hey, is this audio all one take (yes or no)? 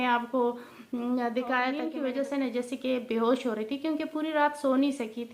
no